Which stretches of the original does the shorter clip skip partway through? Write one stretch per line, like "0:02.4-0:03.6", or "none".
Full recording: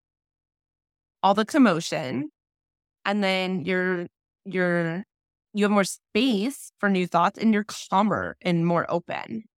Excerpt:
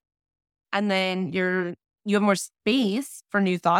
0:04.2-0:05.3